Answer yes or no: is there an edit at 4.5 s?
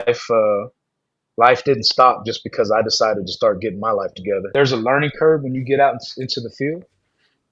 yes